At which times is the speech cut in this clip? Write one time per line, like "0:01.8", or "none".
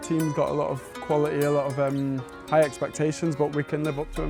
none